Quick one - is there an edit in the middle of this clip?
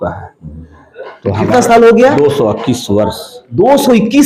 no; 0 cuts

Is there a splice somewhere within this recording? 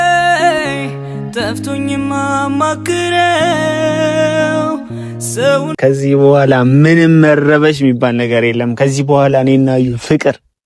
yes; 1 cut; at 5.7 s

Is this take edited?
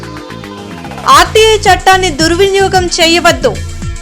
yes; 1 cut; at 1.0 s

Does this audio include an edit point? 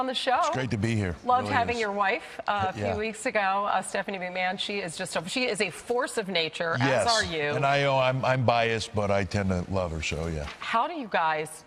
yes; 1 cut; at 6.4 s

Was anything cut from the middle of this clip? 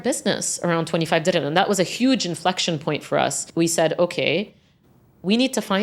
no; 0 cuts

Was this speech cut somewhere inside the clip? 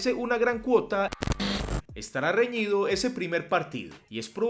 yes; 1 cut; at 1.5 s

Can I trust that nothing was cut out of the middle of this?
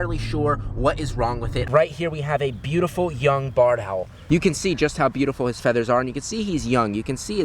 no; 2 cuts; at 1.7 s, 4.4 s

